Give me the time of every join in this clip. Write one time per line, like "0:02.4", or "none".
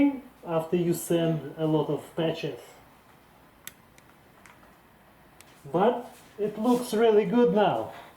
0:03.0
0:05.6
0:06.2